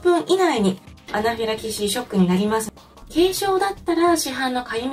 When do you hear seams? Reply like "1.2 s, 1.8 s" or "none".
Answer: 1.0 s, 2.6 s